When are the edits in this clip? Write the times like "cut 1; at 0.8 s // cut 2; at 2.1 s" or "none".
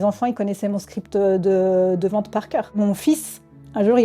cut 1; at 2.8 s